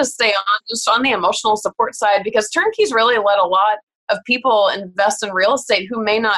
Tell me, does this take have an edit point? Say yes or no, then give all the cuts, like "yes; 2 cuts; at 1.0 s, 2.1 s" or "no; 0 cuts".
no; 0 cuts